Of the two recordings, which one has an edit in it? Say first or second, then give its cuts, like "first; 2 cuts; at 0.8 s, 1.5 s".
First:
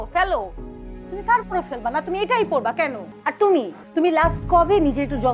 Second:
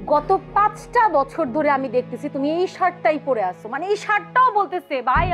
first; 2 cuts; at 3.1 s, 3.8 s